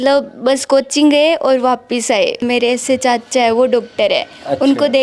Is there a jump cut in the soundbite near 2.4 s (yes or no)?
yes